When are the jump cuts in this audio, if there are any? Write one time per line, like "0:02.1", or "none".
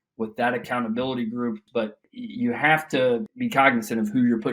0:01.6
0:03.3